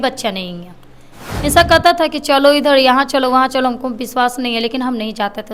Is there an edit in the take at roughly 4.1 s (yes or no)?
no